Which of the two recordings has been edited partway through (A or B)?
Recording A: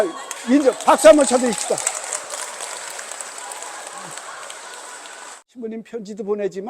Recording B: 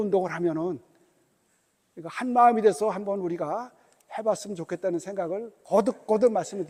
A